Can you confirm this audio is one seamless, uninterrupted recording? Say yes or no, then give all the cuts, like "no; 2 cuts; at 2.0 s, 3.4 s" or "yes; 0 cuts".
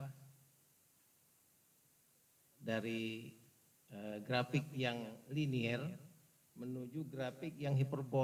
yes; 0 cuts